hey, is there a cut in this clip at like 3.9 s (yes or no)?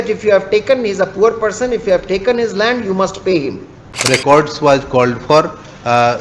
yes